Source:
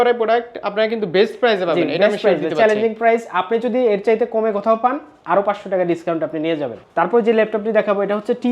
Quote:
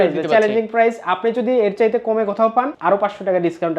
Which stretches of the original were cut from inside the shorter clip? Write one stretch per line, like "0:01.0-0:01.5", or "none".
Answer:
0:05.0-0:05.2